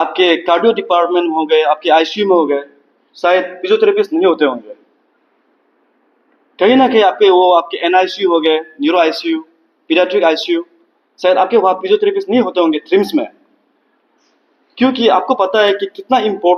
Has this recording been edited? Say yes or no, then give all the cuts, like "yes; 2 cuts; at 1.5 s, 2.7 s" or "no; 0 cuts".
no; 0 cuts